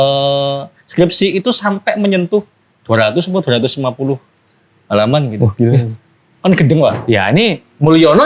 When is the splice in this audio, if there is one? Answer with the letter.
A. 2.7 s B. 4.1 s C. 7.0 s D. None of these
C